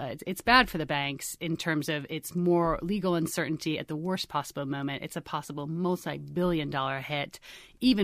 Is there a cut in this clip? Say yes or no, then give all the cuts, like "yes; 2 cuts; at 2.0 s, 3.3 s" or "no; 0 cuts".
no; 0 cuts